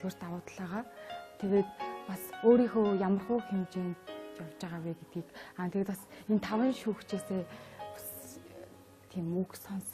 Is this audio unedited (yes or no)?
no